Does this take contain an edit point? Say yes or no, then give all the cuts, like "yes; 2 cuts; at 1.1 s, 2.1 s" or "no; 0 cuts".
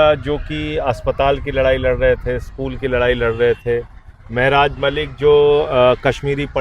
no; 0 cuts